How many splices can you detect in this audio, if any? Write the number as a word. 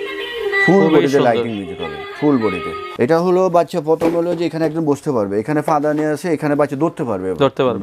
one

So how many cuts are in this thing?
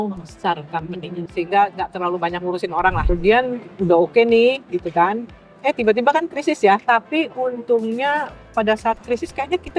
one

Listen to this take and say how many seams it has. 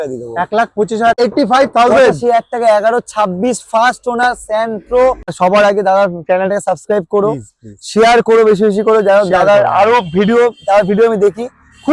two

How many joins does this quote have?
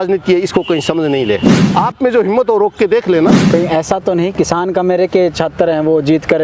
two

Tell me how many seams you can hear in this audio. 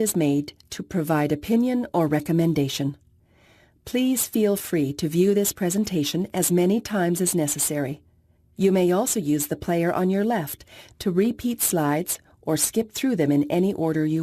one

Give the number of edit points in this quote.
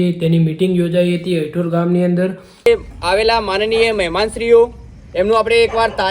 one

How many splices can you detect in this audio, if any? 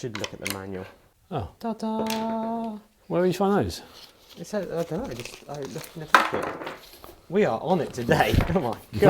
one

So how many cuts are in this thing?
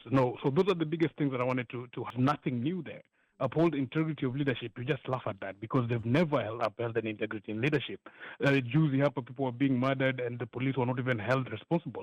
one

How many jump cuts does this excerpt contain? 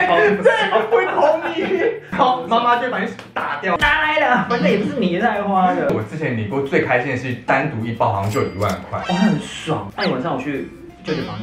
four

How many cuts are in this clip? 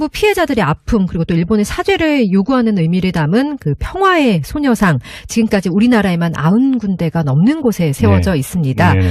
zero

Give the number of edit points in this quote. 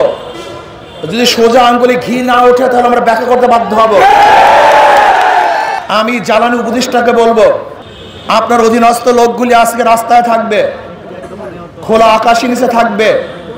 one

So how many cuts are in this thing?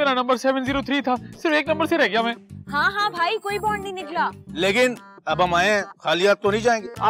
one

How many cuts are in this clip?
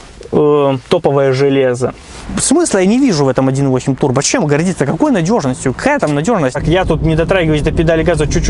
two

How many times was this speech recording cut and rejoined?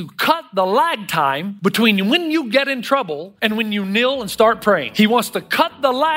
three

